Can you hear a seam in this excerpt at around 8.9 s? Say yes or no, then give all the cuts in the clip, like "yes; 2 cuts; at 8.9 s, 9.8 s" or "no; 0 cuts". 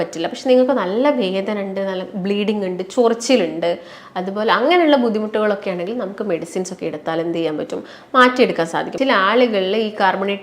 yes; 1 cut; at 8.9 s